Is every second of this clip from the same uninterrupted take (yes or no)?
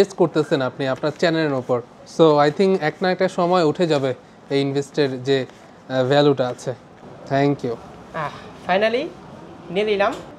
yes